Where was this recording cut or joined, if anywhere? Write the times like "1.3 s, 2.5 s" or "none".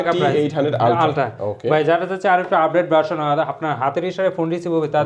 none